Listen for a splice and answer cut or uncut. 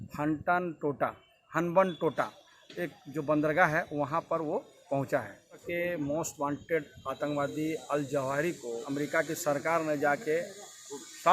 cut